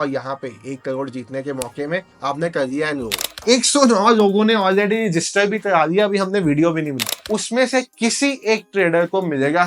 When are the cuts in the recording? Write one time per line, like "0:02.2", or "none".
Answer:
0:03.3
0:07.1